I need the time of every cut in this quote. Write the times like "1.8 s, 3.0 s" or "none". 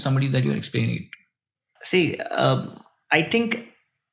1.7 s